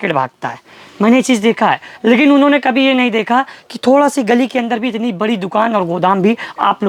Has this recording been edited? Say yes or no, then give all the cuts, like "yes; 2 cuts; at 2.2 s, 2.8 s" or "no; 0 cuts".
no; 0 cuts